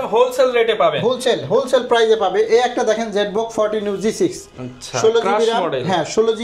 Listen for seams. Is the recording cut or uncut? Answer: uncut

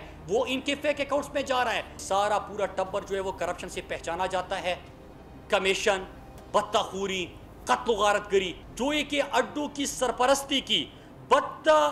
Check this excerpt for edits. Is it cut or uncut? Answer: cut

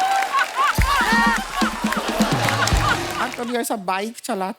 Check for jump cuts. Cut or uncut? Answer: cut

